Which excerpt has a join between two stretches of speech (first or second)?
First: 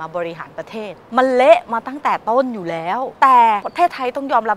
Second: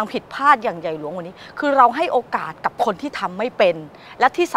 first